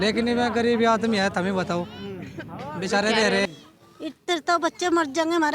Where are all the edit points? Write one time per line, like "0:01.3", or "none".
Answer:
0:03.5

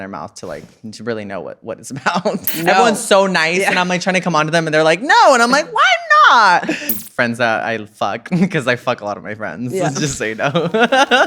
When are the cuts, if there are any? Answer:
0:02.5
0:07.0

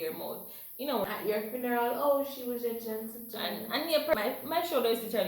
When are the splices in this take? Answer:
0:01.0
0:04.1

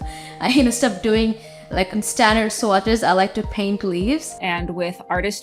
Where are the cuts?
0:04.3

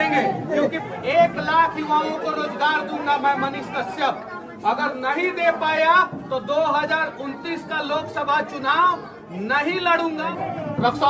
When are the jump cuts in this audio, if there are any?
0:01.1
0:10.2

